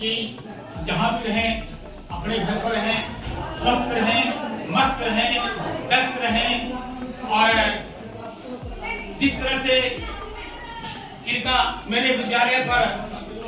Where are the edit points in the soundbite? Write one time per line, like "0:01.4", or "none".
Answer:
none

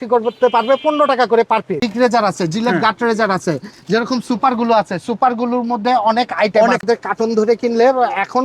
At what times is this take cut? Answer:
0:01.9
0:06.8

